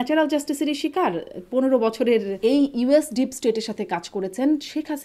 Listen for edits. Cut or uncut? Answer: cut